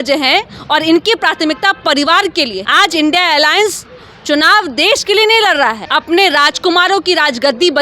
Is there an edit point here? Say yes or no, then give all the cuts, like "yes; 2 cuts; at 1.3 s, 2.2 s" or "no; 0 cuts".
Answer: yes; 2 cuts; at 2.6 s, 5.8 s